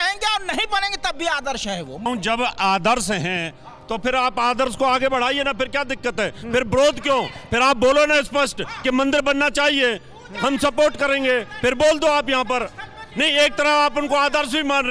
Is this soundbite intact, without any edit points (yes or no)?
no